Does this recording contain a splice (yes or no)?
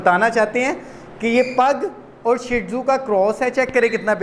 no